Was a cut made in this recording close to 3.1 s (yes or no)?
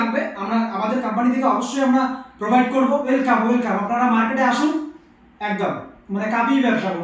yes